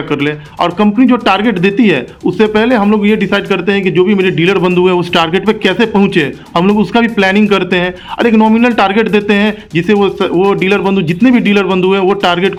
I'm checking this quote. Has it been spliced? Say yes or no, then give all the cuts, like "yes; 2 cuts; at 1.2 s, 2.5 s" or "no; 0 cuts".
no; 0 cuts